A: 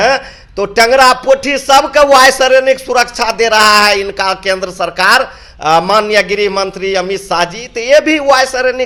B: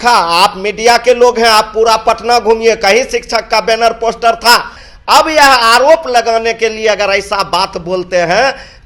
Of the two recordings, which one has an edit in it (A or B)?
B